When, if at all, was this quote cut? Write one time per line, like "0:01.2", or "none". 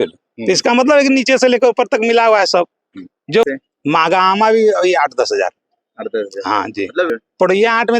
0:03.5
0:07.1